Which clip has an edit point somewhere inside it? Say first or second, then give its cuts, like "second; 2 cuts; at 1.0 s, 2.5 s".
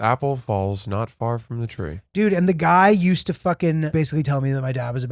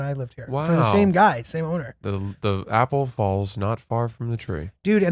first; 1 cut; at 3.9 s